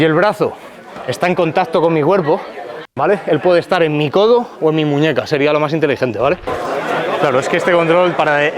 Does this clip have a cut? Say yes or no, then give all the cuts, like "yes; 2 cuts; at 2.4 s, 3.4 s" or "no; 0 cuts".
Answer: yes; 1 cut; at 6.5 s